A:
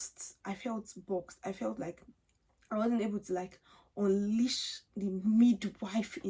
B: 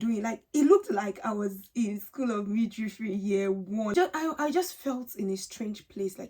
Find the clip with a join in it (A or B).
B